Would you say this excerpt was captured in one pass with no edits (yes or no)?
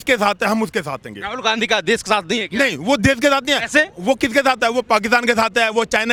yes